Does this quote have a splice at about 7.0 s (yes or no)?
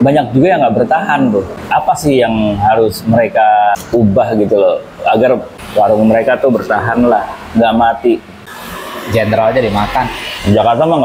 no